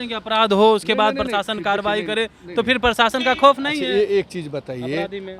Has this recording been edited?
no; 0 cuts

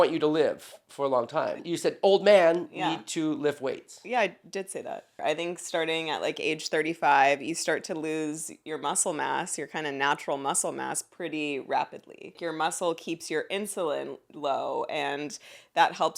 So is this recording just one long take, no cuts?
no; 3 cuts; at 1.6 s, 5.2 s, 12.4 s

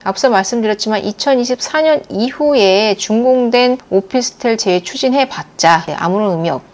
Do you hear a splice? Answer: no; 0 cuts

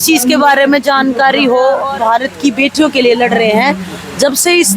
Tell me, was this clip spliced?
yes; 1 cut; at 1.9 s

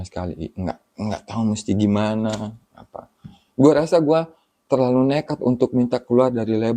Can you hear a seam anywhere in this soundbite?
no; 0 cuts

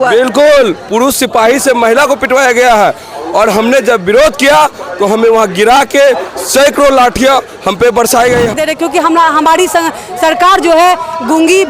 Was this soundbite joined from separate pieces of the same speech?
yes; 1 cut; at 8.6 s

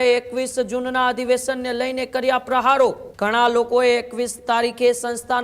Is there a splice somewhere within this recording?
yes; 1 cut; at 3.1 s

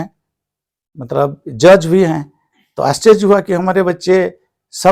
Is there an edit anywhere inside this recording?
no; 0 cuts

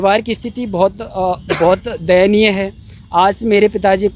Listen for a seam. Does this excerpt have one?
no; 0 cuts

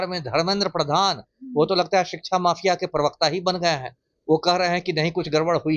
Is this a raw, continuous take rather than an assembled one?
yes; 0 cuts

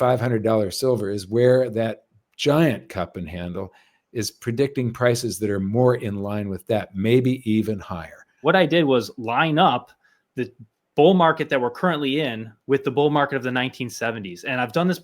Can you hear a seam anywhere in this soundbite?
yes; 1 cut; at 8.4 s

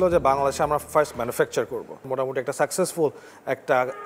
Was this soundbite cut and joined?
yes; 1 cut; at 2.1 s

